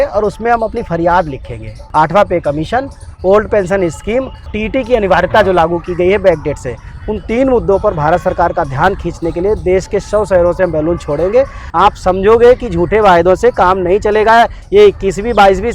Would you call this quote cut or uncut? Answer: cut